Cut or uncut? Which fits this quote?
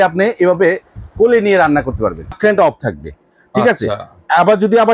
cut